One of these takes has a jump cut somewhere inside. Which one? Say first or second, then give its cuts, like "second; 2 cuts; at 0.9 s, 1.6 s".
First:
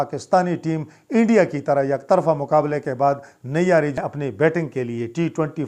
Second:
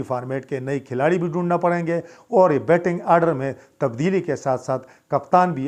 first; 1 cut; at 3.9 s